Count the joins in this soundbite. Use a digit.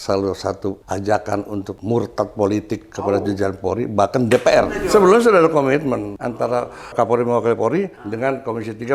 5